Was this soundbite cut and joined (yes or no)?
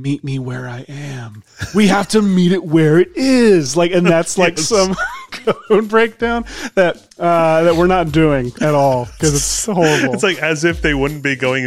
no